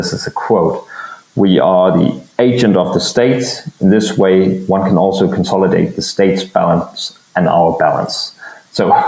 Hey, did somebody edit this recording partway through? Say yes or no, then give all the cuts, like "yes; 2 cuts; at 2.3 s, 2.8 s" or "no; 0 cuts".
no; 0 cuts